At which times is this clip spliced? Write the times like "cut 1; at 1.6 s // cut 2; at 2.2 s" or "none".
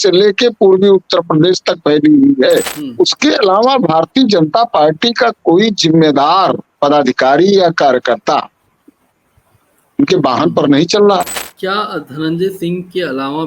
cut 1; at 2.8 s // cut 2; at 11.4 s